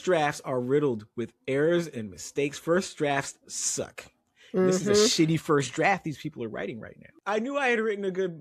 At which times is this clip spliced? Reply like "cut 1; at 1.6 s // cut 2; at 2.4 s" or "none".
cut 1; at 7.1 s